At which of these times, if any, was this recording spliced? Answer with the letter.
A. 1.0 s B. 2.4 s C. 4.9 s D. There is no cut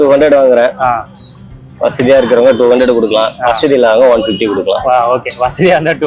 D